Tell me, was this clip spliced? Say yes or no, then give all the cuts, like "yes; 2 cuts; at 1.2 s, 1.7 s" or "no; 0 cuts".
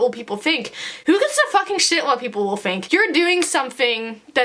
no; 0 cuts